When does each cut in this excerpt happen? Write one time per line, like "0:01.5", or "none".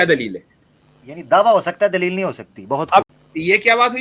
0:03.1